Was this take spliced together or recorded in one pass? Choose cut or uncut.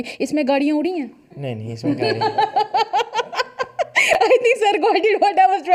uncut